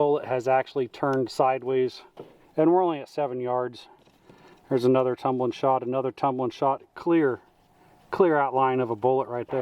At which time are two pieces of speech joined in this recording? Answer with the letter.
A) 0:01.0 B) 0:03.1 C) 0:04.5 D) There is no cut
D